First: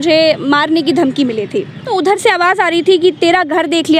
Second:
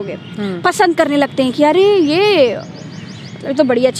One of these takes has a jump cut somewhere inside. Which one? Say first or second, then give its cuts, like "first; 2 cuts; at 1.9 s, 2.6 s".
first; 1 cut; at 1.9 s